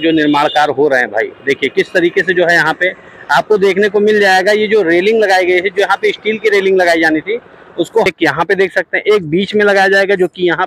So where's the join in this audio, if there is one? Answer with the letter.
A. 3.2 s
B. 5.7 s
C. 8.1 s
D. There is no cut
C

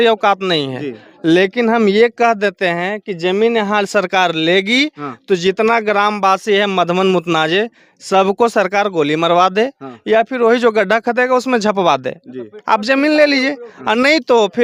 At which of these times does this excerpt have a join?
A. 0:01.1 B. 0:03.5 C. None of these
C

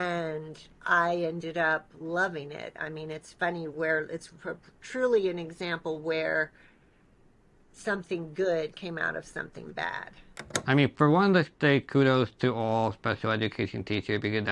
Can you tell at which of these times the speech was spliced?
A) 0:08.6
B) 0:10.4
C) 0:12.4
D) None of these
B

